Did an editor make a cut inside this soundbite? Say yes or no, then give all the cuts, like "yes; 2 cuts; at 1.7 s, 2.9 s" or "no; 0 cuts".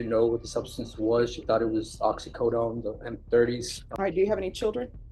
yes; 1 cut; at 3.8 s